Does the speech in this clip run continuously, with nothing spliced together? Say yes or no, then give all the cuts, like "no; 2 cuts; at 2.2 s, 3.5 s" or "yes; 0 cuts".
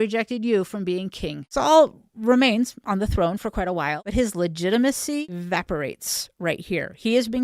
no; 3 cuts; at 1.4 s, 4.0 s, 5.2 s